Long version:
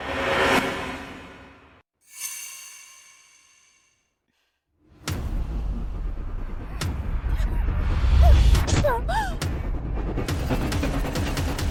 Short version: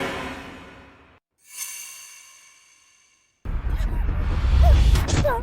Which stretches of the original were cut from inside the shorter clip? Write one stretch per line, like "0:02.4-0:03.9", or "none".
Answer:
0:04.1-0:07.1